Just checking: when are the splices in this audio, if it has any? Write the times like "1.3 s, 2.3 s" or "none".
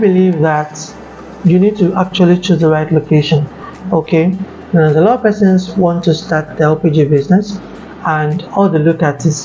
none